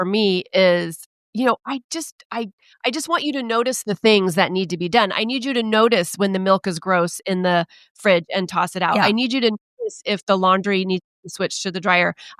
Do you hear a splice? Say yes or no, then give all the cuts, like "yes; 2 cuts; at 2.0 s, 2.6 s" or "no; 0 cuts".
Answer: no; 0 cuts